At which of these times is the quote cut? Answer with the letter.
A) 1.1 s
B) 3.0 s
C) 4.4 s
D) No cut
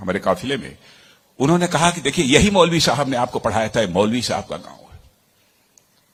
D